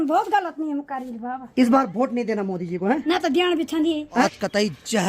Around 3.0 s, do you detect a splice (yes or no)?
yes